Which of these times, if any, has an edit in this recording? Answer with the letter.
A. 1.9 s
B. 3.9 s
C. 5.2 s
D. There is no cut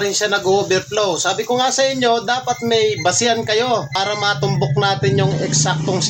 B